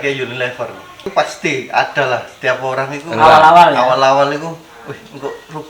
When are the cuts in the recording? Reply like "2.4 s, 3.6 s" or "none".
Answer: 1.1 s